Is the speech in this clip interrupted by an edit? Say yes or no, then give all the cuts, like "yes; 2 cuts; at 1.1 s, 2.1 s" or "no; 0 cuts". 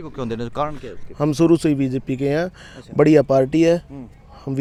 no; 0 cuts